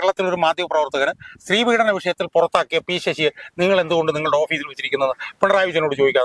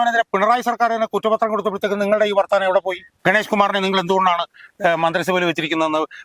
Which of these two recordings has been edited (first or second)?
second